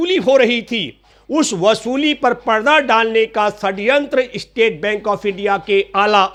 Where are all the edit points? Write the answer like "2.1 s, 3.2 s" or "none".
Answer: none